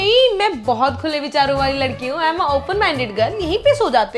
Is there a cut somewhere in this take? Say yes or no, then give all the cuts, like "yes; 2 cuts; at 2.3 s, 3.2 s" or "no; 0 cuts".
no; 0 cuts